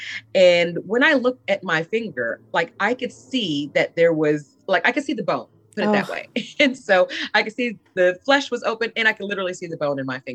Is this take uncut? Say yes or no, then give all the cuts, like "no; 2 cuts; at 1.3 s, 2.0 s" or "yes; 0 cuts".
yes; 0 cuts